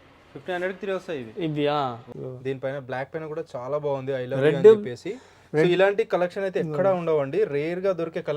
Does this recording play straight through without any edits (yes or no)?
no